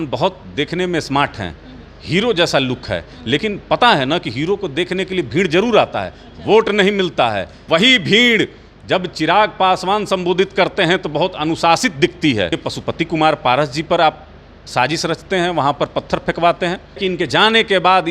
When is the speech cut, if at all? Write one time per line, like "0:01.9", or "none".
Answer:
0:07.6
0:12.6
0:17.0